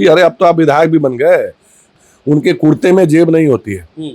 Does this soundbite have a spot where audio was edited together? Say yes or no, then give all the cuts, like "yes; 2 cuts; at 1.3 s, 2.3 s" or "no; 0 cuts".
yes; 1 cut; at 1.9 s